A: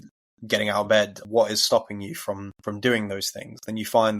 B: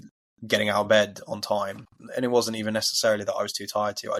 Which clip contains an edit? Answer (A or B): A